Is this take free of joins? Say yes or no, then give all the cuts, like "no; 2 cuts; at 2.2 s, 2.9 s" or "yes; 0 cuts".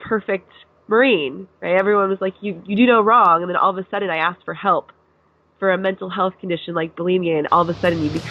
yes; 0 cuts